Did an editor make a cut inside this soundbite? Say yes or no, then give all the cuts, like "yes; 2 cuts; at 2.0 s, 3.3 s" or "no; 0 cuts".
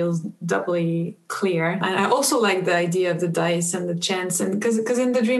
yes; 1 cut; at 1.8 s